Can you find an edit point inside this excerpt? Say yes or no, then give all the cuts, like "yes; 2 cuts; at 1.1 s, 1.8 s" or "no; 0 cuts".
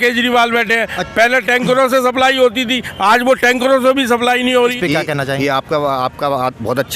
yes; 1 cut; at 4.8 s